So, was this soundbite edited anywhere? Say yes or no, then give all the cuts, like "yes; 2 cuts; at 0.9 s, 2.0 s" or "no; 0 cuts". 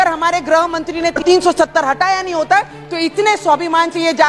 yes; 1 cut; at 1.2 s